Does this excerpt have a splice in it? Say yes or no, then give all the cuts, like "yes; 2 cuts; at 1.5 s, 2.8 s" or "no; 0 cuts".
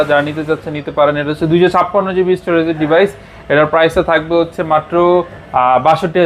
no; 0 cuts